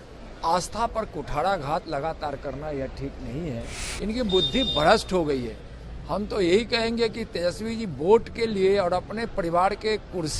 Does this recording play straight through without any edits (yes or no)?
no